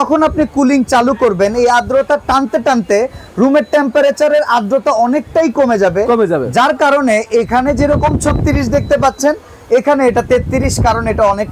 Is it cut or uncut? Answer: uncut